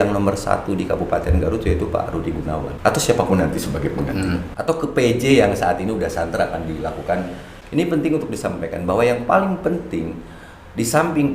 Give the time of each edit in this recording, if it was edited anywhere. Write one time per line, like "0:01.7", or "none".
0:02.7
0:04.5
0:07.5

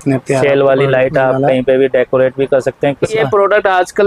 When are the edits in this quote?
0:03.1

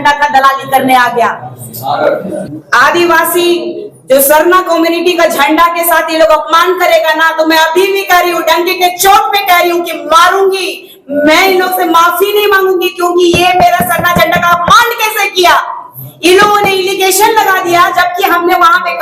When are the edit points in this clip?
0:02.4

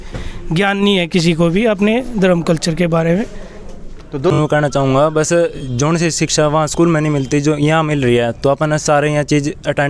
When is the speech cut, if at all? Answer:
0:04.3

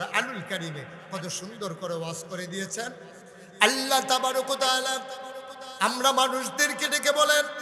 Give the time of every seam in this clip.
0:03.2

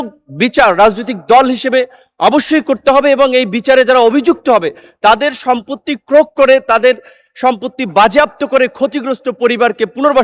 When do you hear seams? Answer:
none

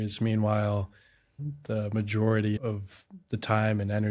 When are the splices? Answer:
0:01.3
0:02.6

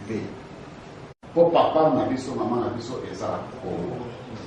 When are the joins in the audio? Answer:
0:01.2

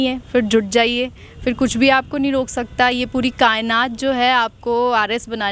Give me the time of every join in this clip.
none

